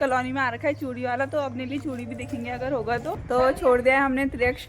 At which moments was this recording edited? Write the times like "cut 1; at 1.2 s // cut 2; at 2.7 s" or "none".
cut 1; at 3.2 s